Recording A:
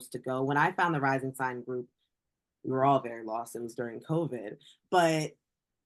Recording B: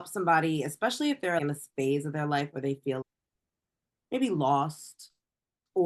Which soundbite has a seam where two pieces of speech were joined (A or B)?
B